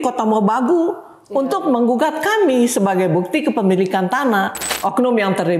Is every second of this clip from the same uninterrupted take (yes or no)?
no